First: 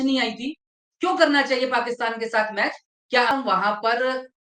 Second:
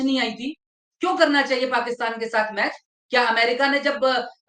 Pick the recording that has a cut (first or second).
first